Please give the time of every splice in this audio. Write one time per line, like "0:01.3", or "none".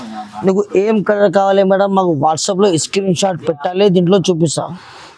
none